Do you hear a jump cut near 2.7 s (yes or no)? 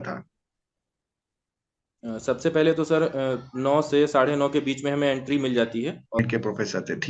no